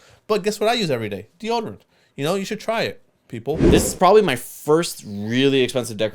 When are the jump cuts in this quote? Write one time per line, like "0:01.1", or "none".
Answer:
0:03.6